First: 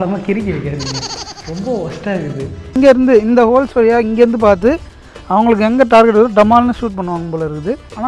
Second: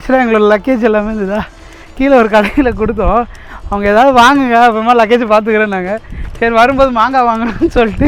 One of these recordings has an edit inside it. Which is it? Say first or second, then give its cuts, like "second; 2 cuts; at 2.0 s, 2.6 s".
first; 1 cut; at 2.7 s